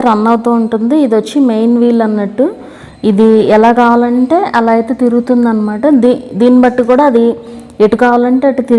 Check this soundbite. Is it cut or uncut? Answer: uncut